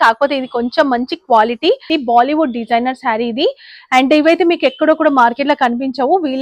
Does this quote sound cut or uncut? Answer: cut